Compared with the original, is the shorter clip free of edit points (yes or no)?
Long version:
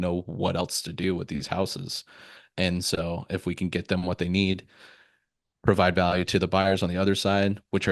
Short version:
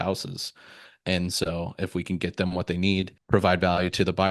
no